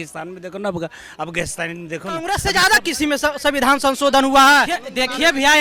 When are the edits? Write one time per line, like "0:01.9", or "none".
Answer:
0:02.2
0:04.8

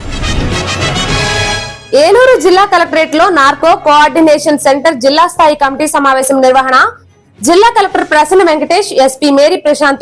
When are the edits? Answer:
0:01.5

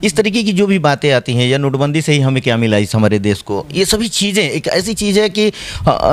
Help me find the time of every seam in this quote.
none

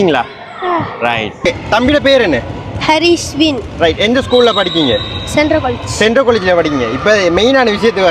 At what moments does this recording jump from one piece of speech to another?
0:01.4

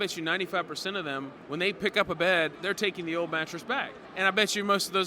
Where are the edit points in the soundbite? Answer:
0:01.4
0:02.6
0:04.0

